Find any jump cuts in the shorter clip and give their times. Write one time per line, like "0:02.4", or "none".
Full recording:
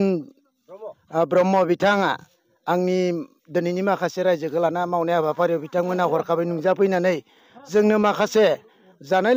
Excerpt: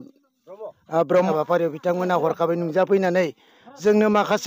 0:01.3